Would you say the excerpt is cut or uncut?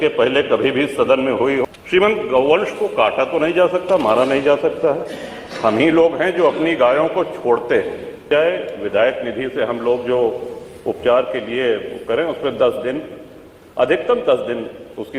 cut